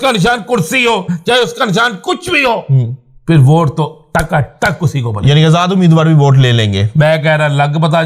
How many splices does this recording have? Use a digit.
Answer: 0